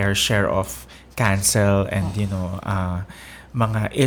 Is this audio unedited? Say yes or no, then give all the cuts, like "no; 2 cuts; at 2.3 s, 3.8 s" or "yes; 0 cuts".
yes; 0 cuts